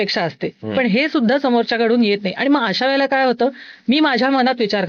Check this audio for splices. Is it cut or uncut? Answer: uncut